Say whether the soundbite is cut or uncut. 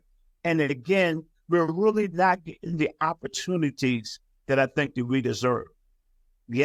uncut